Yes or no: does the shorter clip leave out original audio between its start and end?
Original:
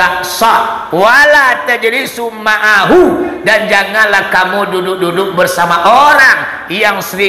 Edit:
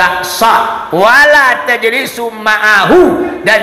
no